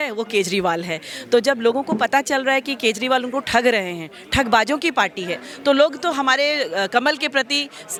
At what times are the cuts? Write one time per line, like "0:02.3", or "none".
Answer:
none